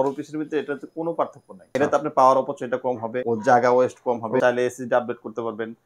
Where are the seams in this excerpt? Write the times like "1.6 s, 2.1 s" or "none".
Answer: 1.7 s, 3.1 s, 4.4 s